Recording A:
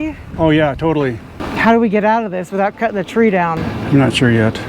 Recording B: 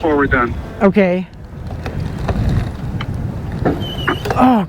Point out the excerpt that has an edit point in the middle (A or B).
A